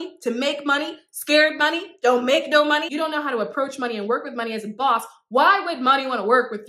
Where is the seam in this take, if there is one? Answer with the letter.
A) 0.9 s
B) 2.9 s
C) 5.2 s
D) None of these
B